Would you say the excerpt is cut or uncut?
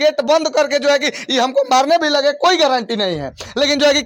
uncut